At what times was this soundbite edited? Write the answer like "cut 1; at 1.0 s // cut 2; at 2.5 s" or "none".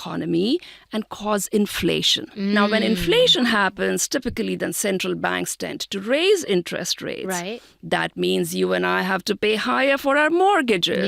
cut 1; at 2.6 s